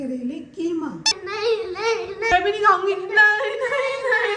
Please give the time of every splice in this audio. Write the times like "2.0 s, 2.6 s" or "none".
1.2 s

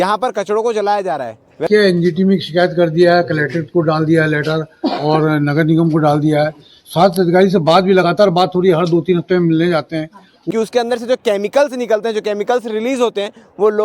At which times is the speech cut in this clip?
1.7 s, 10.3 s

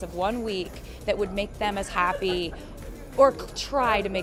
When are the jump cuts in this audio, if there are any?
none

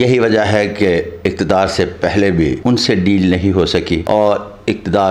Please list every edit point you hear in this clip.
2.6 s, 4.0 s

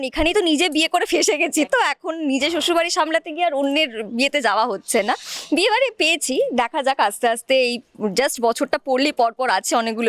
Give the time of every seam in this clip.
none

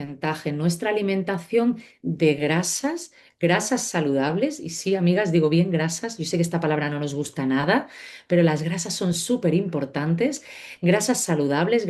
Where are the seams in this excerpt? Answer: none

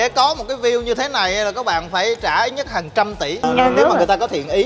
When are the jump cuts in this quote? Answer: 3.4 s

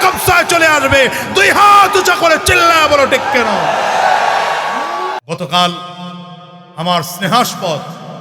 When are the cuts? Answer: 5.2 s

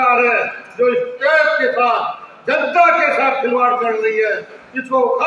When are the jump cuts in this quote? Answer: none

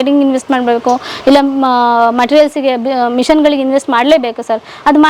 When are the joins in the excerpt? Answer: none

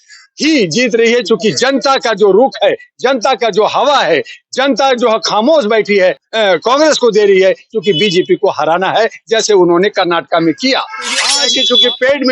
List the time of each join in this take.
6.2 s, 11.3 s

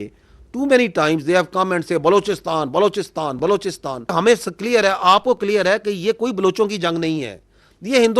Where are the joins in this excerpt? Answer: 4.1 s

